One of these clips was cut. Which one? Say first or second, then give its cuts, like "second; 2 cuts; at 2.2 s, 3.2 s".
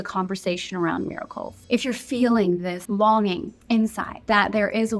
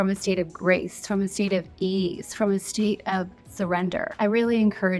first; 1 cut; at 2.8 s